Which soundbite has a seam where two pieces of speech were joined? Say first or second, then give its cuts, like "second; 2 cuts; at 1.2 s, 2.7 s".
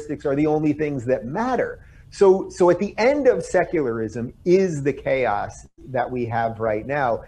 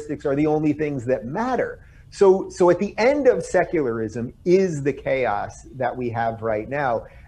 second; 1 cut; at 5.9 s